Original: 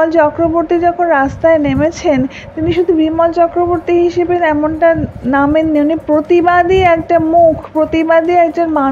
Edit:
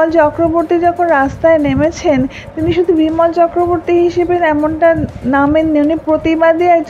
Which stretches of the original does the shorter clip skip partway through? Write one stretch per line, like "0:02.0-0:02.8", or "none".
0:06.0-0:07.7